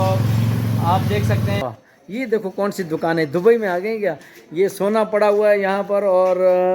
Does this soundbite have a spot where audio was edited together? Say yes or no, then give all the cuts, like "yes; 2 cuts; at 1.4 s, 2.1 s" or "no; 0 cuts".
yes; 1 cut; at 1.6 s